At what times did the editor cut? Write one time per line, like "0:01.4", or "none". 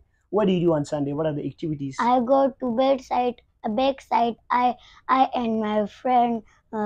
none